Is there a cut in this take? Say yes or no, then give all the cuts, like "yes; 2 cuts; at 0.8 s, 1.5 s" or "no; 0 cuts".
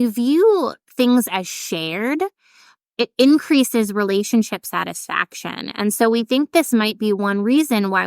yes; 1 cut; at 2.9 s